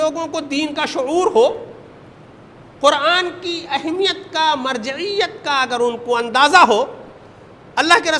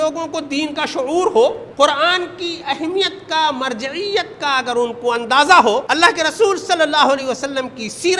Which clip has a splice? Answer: second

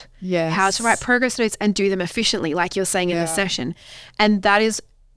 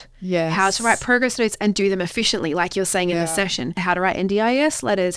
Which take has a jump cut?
second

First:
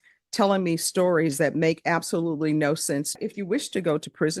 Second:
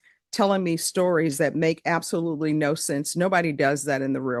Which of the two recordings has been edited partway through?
first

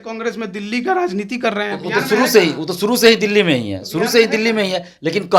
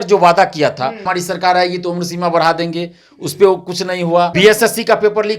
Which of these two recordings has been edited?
second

